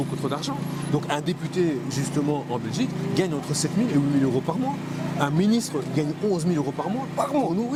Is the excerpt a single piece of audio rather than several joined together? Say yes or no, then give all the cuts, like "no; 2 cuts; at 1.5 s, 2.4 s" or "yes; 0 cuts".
yes; 0 cuts